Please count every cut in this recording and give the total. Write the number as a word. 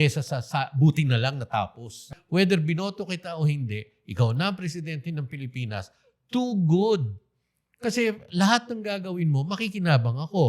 one